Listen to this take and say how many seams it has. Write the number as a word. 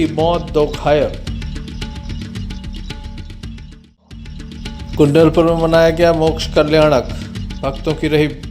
two